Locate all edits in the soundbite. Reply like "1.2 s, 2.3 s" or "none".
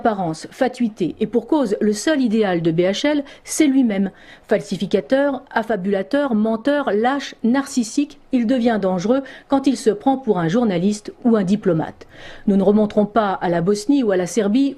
none

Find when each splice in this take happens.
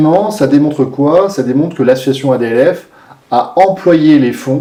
none

